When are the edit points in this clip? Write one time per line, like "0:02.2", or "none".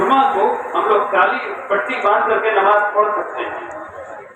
none